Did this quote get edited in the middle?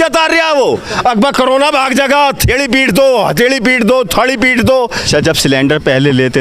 yes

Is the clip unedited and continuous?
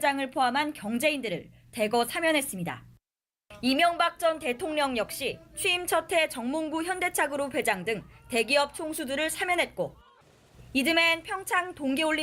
yes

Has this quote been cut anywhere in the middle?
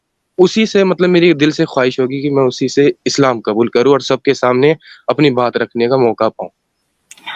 no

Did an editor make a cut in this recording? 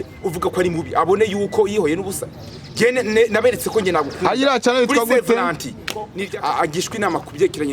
yes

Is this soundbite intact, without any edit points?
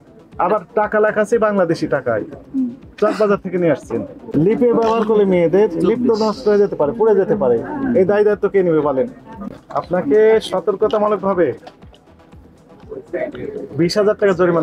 no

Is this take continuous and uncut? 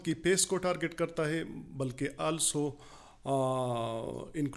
yes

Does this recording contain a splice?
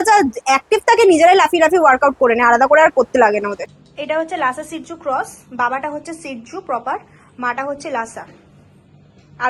no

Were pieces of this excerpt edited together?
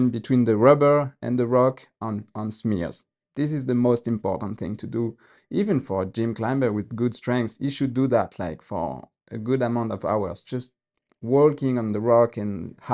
no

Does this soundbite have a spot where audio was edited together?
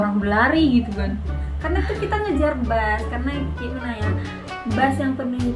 no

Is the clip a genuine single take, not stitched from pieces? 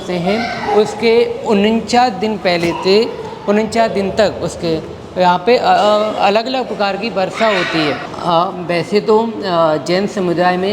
no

